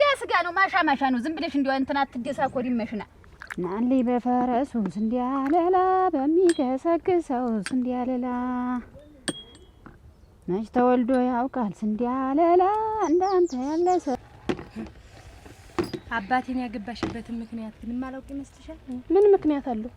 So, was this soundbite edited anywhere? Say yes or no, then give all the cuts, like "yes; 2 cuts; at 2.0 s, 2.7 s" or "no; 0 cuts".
yes; 2 cuts; at 3.1 s, 14.2 s